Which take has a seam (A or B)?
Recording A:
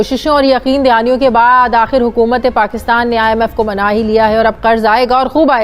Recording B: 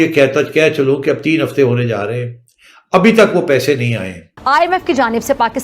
B